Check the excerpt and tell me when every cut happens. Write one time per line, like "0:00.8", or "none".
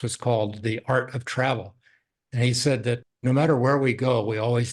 0:03.0